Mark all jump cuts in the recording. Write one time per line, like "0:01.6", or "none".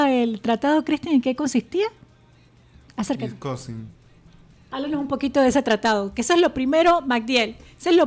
none